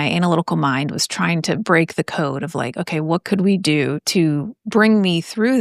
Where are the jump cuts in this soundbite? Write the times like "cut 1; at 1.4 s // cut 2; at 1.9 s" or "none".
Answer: cut 1; at 4.0 s